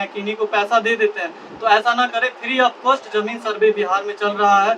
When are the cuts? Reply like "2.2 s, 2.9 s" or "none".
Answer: none